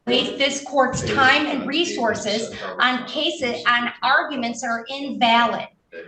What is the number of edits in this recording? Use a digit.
0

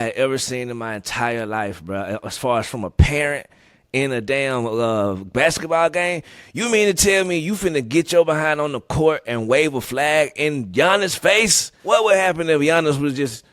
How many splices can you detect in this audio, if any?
1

